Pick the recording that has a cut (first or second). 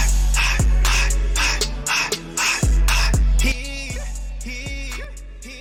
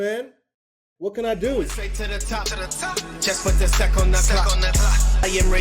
second